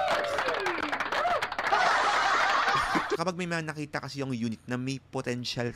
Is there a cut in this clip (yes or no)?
yes